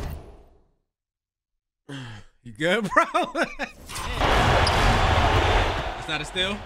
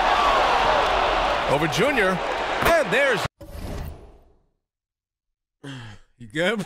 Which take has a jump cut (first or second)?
first